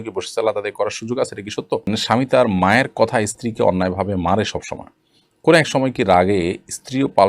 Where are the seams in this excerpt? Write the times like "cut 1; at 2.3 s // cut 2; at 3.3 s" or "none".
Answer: cut 1; at 2.0 s